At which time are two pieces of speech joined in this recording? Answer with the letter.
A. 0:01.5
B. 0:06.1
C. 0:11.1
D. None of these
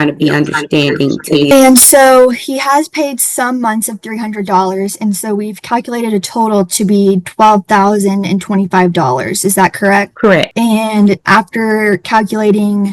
A